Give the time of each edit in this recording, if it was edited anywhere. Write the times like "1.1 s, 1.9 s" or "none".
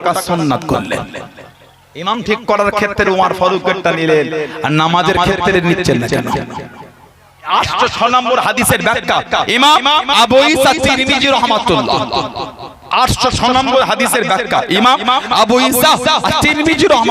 7.5 s